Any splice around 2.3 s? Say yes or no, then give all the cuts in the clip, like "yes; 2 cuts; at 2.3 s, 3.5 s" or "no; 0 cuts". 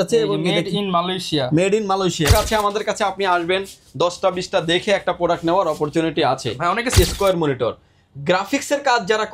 yes; 2 cuts; at 2.3 s, 7.0 s